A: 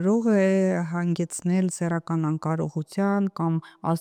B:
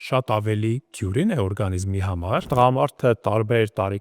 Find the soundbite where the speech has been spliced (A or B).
B